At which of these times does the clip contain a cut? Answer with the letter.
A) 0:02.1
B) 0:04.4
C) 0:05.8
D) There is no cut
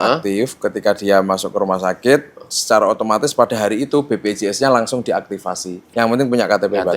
C